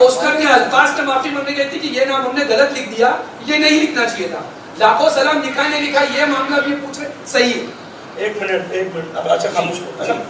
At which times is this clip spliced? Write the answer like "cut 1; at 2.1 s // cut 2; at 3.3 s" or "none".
none